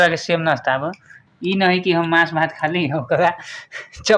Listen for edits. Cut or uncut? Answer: uncut